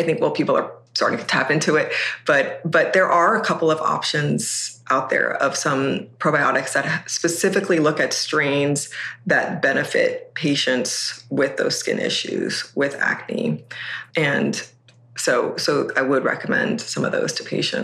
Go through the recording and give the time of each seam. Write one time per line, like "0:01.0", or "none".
none